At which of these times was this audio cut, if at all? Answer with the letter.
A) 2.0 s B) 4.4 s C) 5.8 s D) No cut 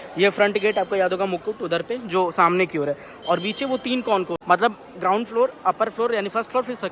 B